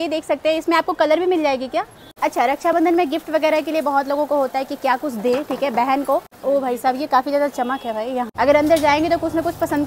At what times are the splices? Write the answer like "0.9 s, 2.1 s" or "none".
2.1 s, 6.3 s, 8.3 s